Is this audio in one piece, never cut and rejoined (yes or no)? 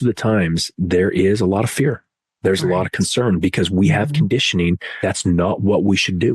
no